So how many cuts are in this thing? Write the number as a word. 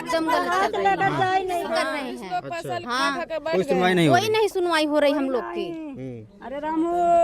one